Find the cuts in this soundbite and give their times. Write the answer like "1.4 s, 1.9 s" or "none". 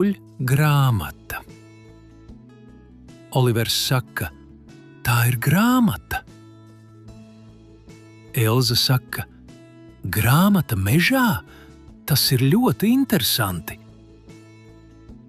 1.5 s, 3.3 s